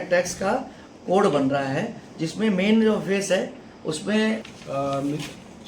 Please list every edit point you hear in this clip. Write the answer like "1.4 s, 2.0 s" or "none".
4.5 s